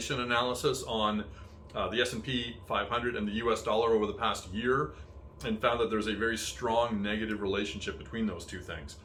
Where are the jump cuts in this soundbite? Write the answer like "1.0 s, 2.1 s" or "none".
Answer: none